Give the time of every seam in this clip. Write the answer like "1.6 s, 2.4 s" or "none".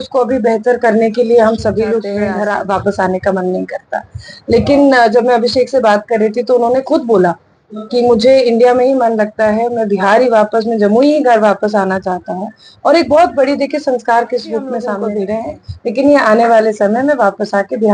2.1 s, 14.9 s